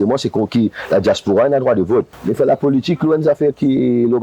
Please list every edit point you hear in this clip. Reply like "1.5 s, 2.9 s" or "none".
2.2 s